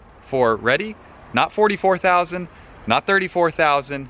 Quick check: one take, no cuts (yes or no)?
yes